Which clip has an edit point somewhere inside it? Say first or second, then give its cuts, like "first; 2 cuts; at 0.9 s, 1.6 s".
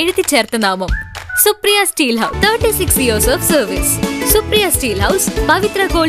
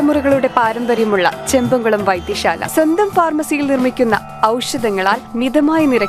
first; 1 cut; at 1.9 s